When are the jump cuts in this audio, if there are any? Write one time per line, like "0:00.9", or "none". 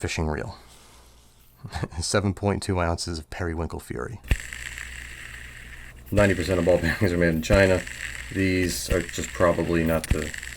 0:04.2